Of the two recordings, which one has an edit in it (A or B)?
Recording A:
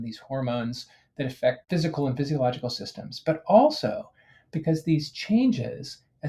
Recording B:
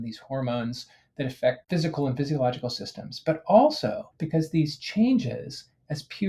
B